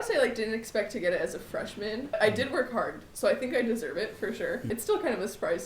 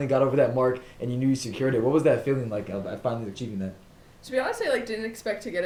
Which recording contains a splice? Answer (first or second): first